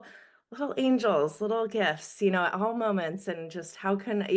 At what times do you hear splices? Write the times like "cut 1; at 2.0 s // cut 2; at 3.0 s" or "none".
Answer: none

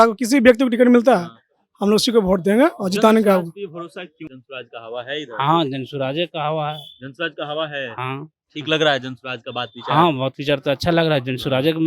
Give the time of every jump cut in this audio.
cut 1; at 4.4 s

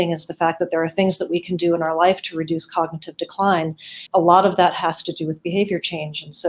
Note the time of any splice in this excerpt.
cut 1; at 4.0 s

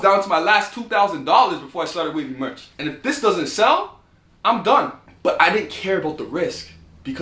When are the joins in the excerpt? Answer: cut 1; at 2.7 s // cut 2; at 5.0 s

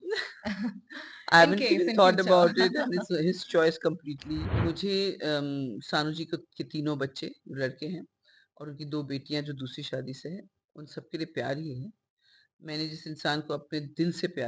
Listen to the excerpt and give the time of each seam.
cut 1; at 4.5 s

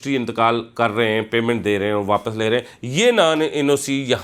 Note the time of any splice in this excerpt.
none

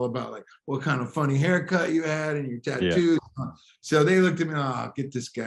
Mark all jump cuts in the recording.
none

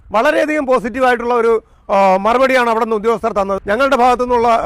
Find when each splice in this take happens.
cut 1; at 3.6 s

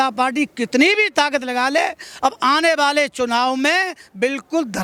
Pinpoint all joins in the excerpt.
none

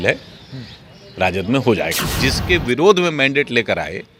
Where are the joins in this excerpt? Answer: cut 1; at 2.0 s

